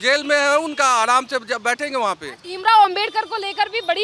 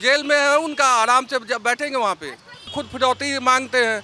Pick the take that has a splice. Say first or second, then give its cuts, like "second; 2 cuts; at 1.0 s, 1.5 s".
second; 1 cut; at 2.6 s